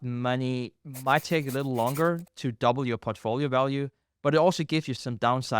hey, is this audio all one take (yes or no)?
yes